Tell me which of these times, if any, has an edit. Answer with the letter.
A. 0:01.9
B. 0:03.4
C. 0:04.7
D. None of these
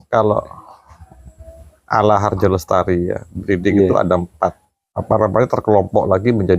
C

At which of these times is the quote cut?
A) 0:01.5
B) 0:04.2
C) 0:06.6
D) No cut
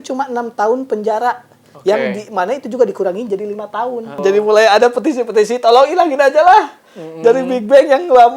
B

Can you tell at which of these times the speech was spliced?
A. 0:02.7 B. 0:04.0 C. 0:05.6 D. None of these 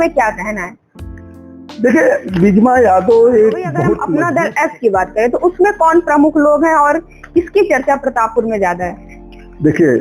B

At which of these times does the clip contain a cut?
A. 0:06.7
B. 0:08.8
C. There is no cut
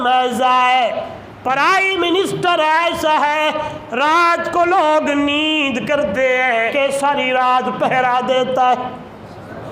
A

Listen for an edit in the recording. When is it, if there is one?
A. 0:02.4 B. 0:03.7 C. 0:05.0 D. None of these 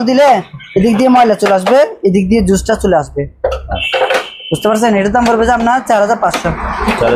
D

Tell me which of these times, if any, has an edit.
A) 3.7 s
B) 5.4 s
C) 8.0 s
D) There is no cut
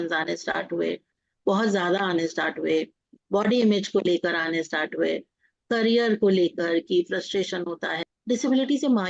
C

